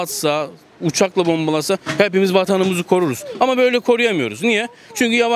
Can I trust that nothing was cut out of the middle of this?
yes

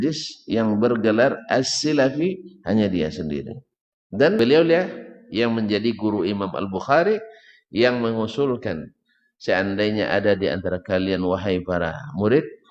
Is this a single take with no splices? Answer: no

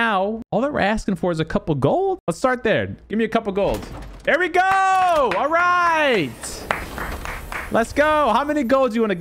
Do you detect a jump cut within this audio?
no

